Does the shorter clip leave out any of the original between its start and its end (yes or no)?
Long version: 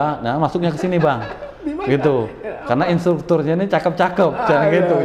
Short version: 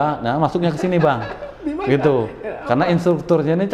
no